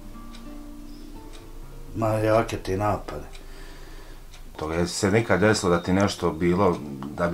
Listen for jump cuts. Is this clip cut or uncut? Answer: cut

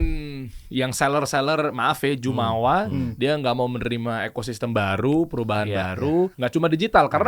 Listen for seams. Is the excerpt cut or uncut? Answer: cut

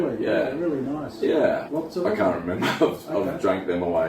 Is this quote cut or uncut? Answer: cut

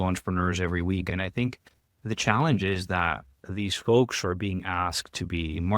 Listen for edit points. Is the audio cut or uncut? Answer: cut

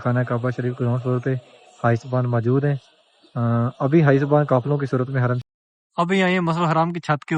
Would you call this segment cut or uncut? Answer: cut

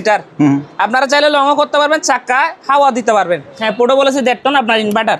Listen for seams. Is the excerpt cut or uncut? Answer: cut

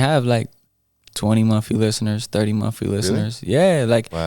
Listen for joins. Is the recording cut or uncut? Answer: uncut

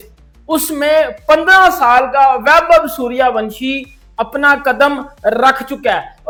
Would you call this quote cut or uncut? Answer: uncut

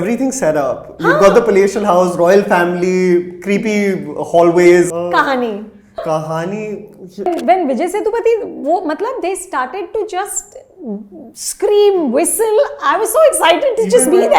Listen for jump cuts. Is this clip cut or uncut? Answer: cut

